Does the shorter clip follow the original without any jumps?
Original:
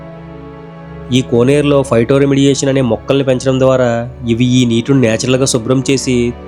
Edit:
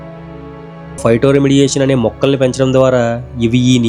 no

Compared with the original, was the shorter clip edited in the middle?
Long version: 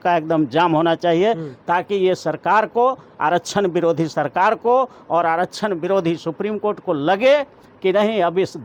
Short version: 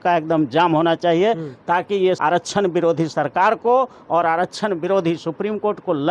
yes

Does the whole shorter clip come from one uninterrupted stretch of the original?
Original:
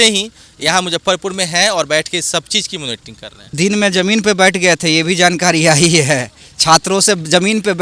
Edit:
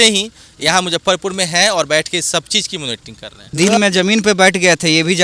yes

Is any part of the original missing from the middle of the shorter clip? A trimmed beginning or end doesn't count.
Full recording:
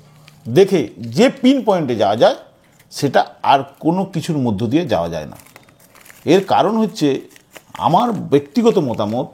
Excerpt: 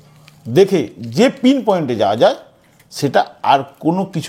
no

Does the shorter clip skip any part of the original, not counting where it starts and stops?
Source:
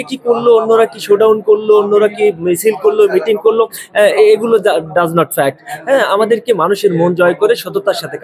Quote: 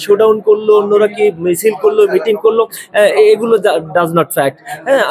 no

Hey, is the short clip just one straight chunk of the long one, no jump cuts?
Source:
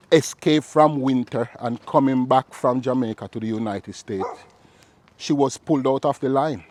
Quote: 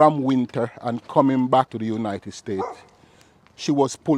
no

